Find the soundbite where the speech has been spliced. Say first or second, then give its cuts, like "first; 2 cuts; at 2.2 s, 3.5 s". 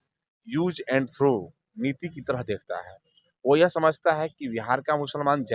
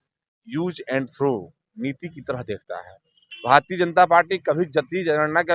second; 1 cut; at 3.3 s